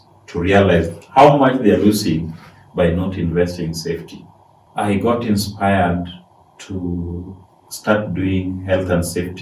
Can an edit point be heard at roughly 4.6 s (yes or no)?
yes